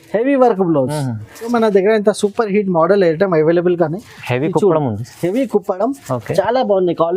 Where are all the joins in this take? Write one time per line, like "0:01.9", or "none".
0:01.5